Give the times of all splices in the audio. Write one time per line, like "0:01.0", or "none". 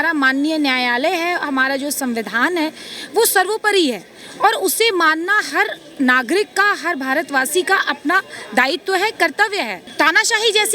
0:09.8